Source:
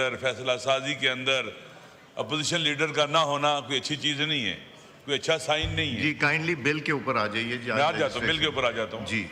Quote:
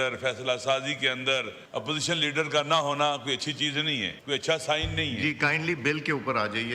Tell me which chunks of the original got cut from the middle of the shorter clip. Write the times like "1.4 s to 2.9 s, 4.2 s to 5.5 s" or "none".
1.6 s to 2.0 s, 4.6 s to 4.9 s